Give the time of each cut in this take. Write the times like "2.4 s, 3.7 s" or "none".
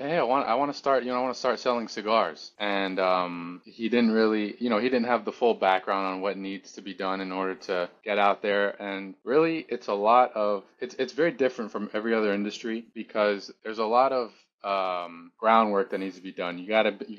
none

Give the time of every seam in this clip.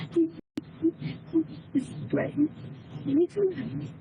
none

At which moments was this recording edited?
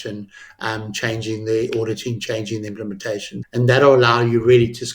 3.4 s

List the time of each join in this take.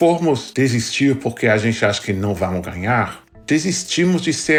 none

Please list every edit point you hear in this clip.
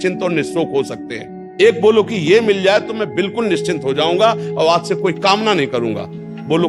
1.4 s

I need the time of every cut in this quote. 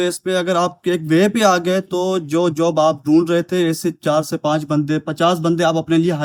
none

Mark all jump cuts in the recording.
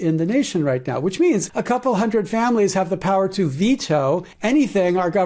1.5 s

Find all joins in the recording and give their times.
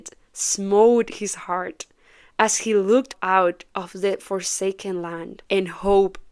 5.4 s

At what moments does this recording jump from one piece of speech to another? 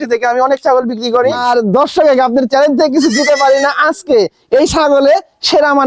1.4 s

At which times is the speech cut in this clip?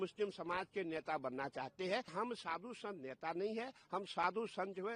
2.1 s

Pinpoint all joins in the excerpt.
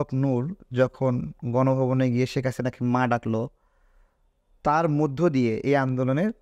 none

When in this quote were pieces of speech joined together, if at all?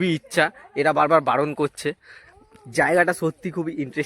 none

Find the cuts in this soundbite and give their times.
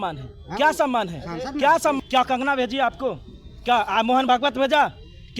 2.0 s

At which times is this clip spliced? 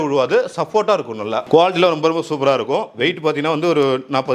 1.4 s

